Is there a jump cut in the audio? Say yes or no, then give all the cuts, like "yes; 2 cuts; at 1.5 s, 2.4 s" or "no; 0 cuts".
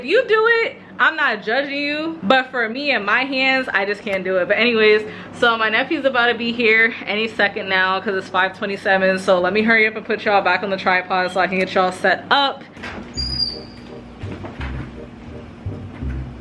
no; 0 cuts